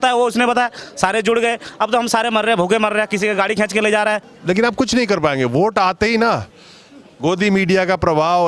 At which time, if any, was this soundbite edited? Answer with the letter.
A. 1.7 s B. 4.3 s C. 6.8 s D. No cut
B